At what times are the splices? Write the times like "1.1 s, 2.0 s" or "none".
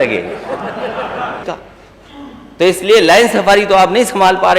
1.4 s